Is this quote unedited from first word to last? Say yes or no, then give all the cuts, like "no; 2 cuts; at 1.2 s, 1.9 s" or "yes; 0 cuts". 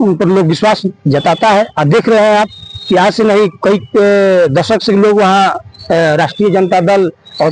yes; 0 cuts